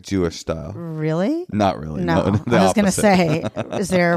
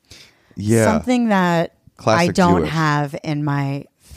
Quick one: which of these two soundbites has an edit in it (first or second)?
second